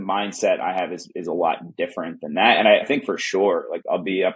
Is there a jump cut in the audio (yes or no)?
no